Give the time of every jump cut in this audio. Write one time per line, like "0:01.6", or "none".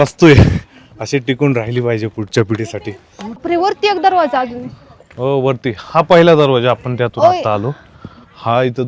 0:03.4